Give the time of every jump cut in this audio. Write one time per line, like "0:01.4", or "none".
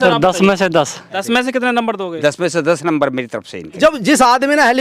0:01.0
0:03.7